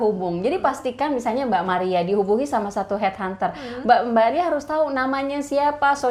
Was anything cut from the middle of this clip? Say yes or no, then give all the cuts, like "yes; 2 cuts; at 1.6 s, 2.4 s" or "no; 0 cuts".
no; 0 cuts